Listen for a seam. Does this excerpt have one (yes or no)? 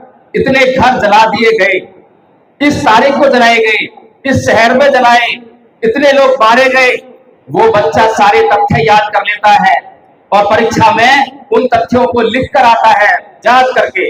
no